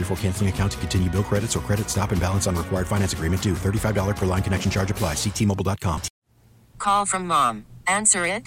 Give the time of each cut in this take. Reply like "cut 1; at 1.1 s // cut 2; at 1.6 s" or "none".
cut 1; at 6.1 s